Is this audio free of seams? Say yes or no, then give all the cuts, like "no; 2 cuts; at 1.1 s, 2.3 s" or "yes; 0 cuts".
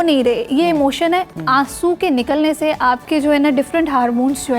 no; 2 cuts; at 1.4 s, 3.0 s